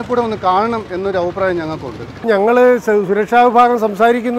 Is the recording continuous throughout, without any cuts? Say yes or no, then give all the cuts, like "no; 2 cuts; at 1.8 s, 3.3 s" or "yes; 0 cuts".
no; 1 cut; at 2.2 s